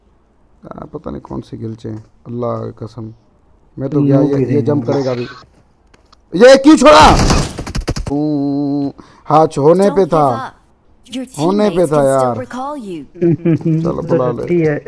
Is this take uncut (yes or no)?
no